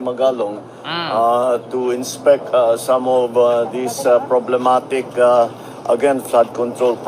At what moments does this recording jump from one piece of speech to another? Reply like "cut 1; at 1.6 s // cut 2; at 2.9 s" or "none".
none